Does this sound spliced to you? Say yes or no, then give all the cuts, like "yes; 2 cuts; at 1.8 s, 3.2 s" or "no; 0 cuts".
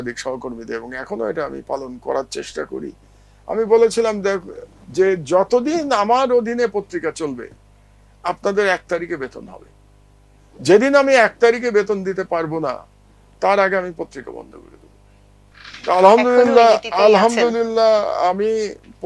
no; 0 cuts